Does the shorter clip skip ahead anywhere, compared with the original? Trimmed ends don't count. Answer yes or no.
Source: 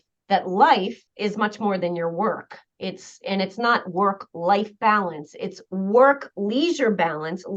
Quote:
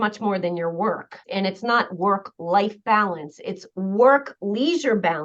yes